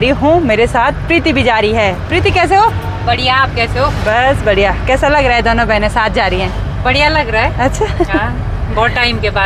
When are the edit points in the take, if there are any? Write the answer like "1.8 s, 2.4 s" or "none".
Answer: none